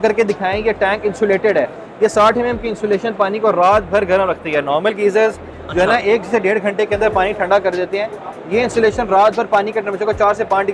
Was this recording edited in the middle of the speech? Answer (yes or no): no